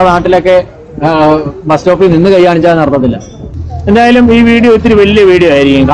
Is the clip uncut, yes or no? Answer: no